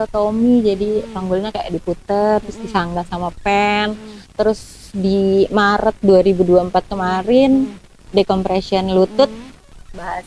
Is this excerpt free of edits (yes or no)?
yes